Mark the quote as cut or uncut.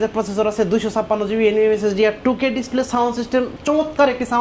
uncut